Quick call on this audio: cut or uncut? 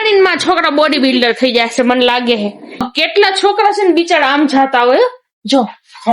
cut